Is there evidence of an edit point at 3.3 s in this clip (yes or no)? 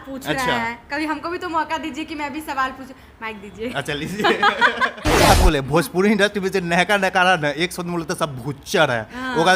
no